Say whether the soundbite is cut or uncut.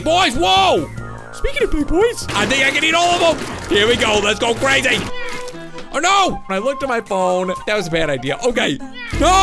cut